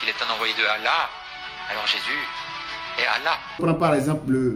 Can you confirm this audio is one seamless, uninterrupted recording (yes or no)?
no